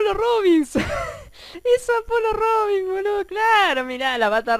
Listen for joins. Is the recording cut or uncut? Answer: uncut